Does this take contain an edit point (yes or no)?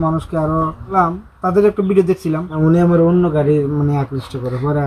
yes